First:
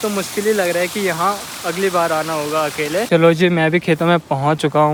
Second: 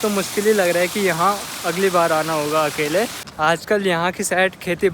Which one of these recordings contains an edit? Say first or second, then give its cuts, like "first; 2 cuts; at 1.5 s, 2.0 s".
second; 1 cut; at 3.1 s